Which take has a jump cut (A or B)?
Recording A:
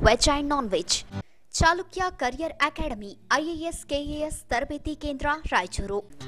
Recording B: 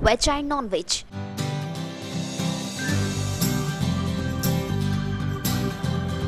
A